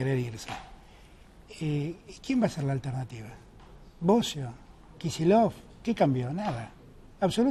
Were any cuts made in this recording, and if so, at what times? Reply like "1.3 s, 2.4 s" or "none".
none